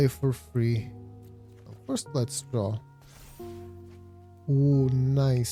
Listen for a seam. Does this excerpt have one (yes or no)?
no